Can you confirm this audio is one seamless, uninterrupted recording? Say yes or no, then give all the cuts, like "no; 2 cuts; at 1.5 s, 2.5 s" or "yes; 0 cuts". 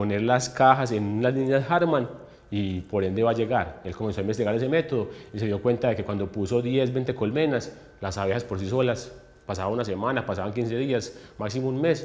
yes; 0 cuts